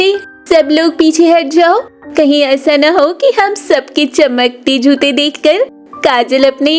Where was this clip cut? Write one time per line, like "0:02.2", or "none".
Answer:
none